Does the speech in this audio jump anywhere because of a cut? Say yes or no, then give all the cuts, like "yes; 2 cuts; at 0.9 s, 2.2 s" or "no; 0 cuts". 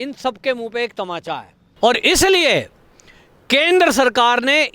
yes; 1 cut; at 1.6 s